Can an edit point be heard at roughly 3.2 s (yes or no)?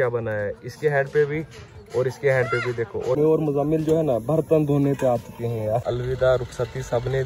yes